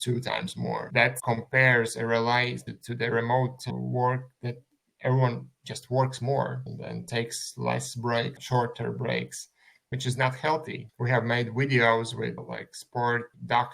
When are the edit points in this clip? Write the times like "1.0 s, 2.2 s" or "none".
9.9 s